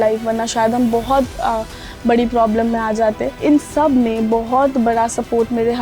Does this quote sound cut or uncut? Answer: cut